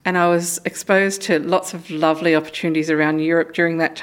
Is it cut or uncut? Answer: uncut